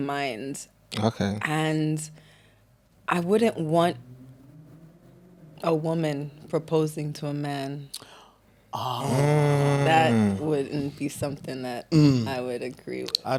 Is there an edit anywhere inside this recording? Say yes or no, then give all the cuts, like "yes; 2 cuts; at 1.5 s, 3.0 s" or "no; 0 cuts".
no; 0 cuts